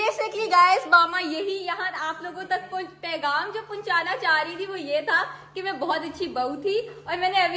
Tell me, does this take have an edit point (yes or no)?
no